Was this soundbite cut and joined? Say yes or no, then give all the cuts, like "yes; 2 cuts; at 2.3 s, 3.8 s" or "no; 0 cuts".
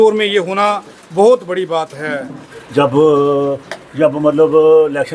yes; 1 cut; at 2.4 s